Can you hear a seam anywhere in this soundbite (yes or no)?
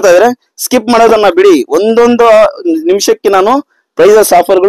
no